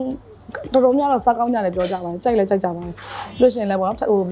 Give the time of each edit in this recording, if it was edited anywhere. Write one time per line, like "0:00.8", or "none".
none